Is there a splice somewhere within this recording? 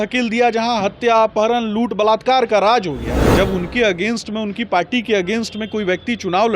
yes; 1 cut; at 3.2 s

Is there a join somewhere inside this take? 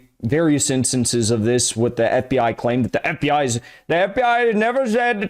no; 0 cuts

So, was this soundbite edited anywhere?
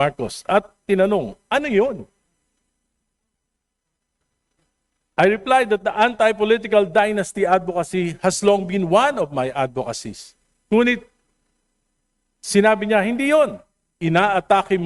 no; 0 cuts

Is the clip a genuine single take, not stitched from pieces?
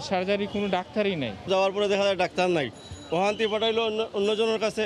yes; 0 cuts

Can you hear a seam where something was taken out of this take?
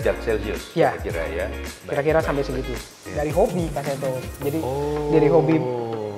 yes; 1 cut; at 3.1 s

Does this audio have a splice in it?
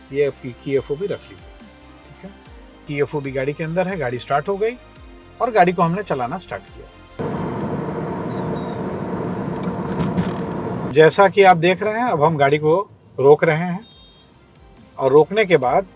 yes; 2 cuts; at 2.8 s, 10.9 s

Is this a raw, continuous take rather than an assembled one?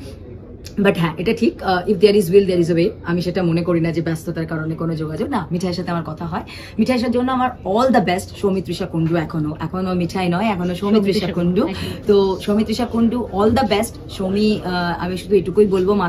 yes; 0 cuts

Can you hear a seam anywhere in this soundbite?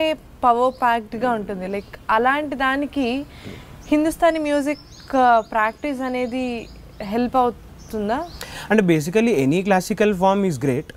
no; 0 cuts

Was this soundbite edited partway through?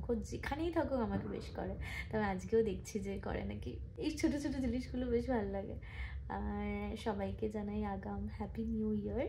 no; 0 cuts

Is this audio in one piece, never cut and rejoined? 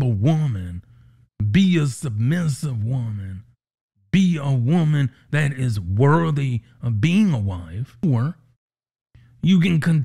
no; 1 cut; at 8.0 s

